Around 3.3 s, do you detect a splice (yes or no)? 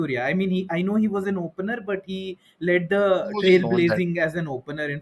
no